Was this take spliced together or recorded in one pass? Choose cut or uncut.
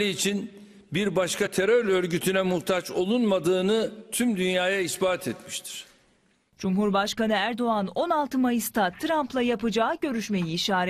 cut